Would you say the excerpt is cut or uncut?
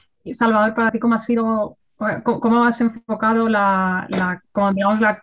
cut